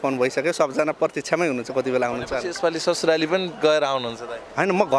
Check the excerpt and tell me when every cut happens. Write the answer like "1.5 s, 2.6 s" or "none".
none